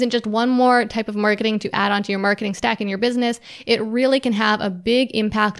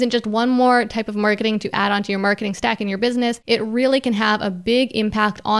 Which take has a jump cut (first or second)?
second